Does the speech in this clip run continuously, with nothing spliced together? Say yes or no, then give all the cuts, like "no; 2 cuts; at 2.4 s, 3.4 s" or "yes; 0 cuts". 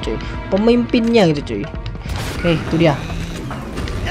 no; 1 cut; at 2.3 s